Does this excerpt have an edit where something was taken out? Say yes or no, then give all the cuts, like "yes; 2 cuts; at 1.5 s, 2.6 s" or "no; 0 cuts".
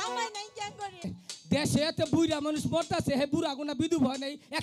yes; 1 cut; at 1.2 s